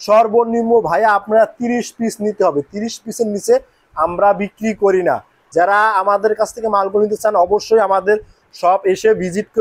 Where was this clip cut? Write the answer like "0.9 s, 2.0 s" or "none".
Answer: 5.4 s